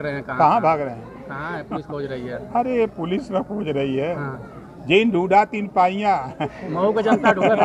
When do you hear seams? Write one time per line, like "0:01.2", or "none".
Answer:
none